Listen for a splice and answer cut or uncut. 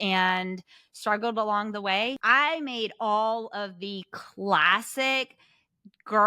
cut